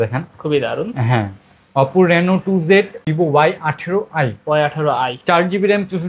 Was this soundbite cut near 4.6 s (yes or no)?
no